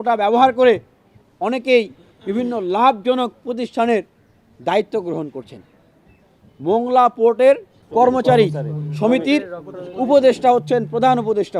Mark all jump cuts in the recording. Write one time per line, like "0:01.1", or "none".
0:07.8

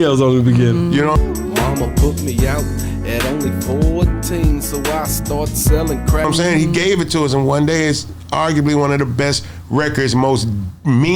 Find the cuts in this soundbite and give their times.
0:06.2

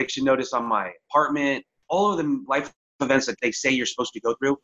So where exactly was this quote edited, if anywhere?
0:01.7
0:02.4
0:03.3

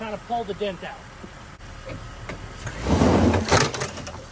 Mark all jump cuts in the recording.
0:01.3

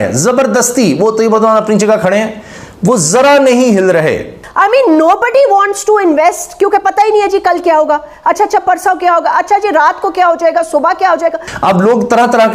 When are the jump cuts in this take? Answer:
0:04.4
0:11.5

